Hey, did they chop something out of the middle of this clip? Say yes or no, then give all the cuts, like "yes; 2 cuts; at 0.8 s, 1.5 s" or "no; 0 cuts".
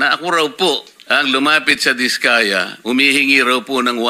yes; 1 cut; at 0.9 s